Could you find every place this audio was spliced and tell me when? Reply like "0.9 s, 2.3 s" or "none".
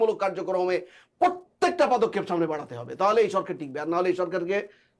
none